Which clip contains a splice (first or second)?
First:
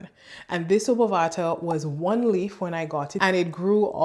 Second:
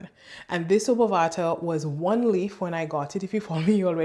first